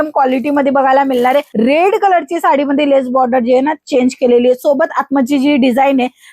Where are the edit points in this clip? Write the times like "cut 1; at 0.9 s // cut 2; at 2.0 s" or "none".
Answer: cut 1; at 1.5 s